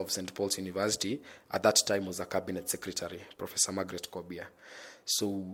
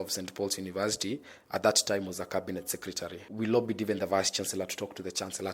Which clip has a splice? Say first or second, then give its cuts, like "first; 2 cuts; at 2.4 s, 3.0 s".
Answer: second; 1 cut; at 3.2 s